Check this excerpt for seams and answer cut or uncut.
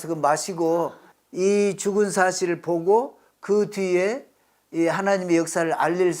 cut